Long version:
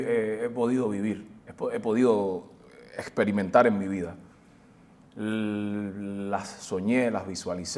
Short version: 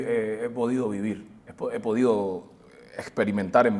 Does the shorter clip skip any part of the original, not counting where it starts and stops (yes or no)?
no